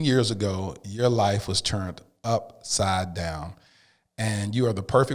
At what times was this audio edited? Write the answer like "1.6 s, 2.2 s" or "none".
none